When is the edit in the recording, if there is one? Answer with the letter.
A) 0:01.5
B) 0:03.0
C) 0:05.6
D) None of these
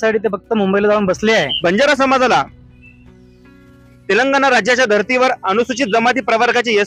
A